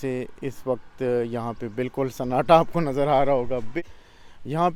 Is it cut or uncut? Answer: cut